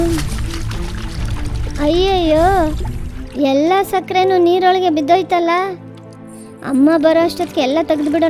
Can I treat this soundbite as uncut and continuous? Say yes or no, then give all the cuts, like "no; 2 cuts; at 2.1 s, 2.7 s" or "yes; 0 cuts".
yes; 0 cuts